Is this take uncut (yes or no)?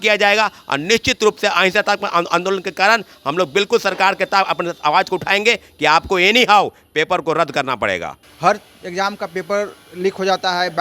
no